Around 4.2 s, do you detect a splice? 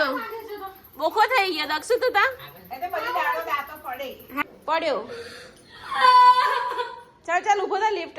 yes; 1 cut; at 4.2 s

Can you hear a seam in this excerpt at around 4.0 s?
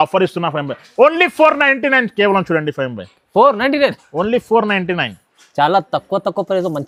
no; 0 cuts

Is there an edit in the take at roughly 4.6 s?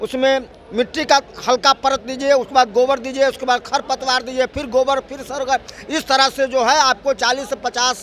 no; 0 cuts

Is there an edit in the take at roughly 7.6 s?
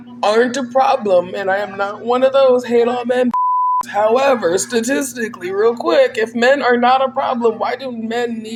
no; 0 cuts

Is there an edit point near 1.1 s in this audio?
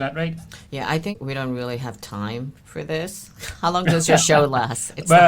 yes; 1 cut; at 1.1 s

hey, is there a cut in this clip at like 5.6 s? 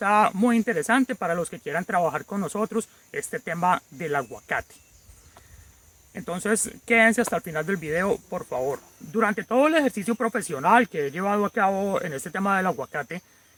no; 0 cuts

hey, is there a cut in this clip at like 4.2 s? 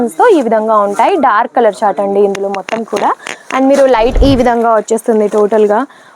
yes; 1 cut; at 4.2 s

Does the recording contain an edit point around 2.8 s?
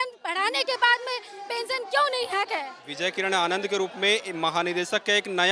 yes; 1 cut; at 2.8 s

